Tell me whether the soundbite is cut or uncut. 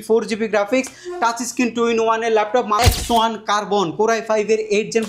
cut